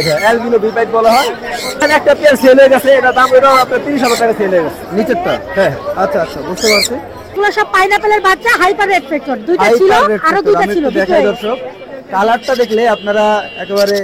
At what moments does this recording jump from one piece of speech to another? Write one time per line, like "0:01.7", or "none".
0:01.8
0:07.3